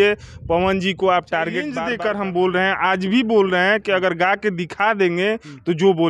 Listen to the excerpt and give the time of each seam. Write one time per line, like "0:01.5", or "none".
0:01.8